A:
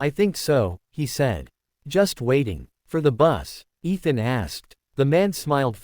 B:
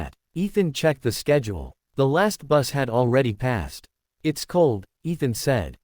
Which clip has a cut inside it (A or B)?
A